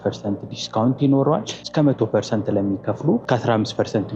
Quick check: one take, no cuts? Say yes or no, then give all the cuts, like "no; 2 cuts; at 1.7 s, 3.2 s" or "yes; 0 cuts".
no; 2 cuts; at 1.6 s, 3.2 s